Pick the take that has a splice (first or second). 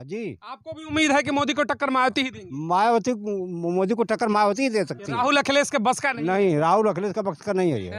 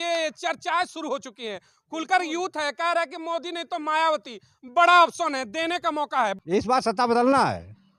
second